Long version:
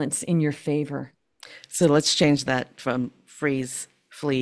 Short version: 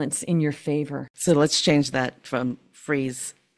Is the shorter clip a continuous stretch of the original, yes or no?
no